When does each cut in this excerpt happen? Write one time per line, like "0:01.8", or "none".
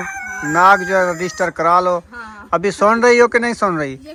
none

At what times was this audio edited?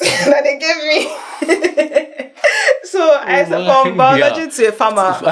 none

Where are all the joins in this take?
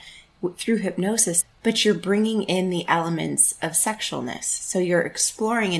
0:01.4

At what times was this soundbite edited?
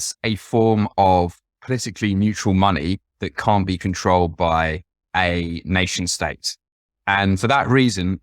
0:04.9

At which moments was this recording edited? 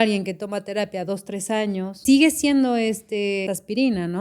0:02.0
0:03.5

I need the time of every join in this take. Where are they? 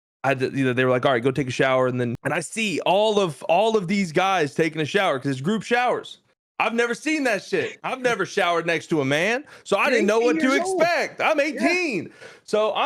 0:02.2

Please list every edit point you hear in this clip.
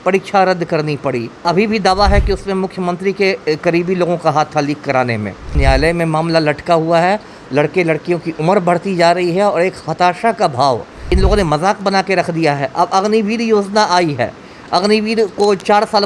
0:01.4
0:05.6
0:11.1

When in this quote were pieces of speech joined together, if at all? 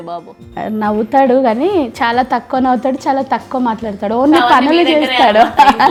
none

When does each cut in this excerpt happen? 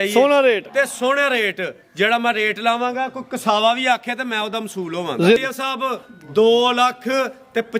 0:05.4

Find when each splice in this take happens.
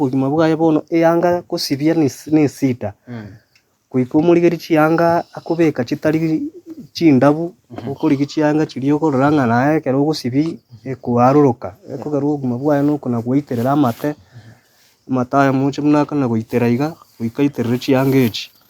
none

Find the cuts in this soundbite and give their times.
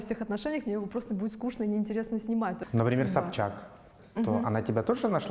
0:02.6

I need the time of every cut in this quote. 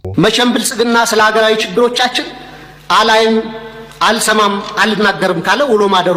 none

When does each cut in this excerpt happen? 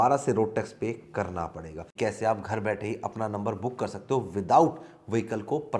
0:01.8

